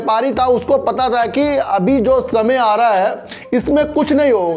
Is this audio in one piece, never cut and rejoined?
yes; 0 cuts

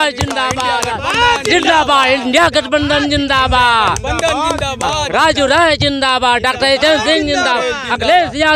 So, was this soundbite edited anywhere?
no; 0 cuts

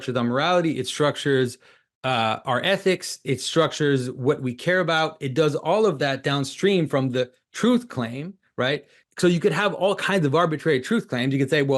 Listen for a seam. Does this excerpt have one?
yes; 1 cut; at 9.0 s

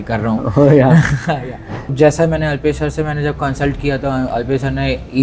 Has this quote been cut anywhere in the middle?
yes; 1 cut; at 1.9 s

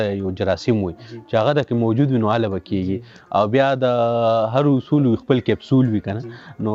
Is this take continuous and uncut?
yes; 0 cuts

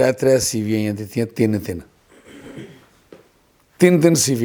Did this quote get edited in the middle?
no; 0 cuts

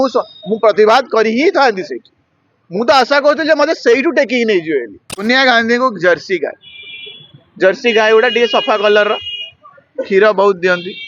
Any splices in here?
yes; 1 cut; at 5.2 s

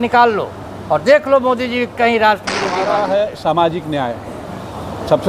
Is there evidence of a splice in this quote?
yes; 1 cut; at 2.8 s

